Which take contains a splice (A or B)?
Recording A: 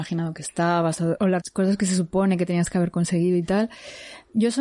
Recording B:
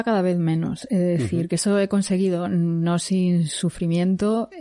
A